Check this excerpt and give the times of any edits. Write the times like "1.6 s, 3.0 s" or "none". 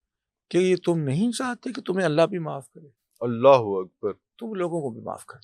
none